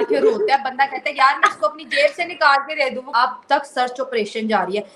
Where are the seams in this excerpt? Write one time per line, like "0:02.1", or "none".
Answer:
0:03.1

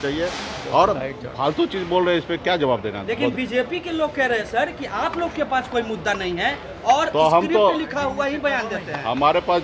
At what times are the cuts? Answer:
none

